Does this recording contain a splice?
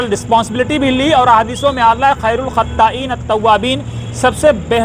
no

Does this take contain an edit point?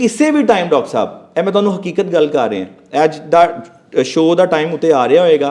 no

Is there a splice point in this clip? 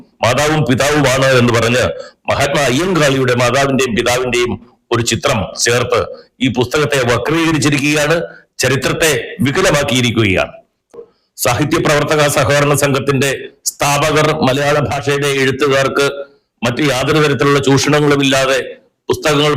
yes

